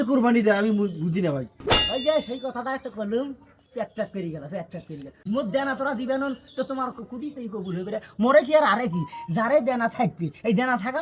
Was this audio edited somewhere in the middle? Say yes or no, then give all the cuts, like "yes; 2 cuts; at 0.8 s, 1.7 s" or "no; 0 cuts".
yes; 1 cut; at 5.2 s